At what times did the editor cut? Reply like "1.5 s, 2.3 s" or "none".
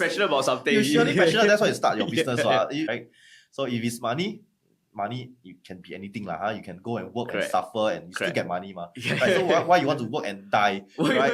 2.9 s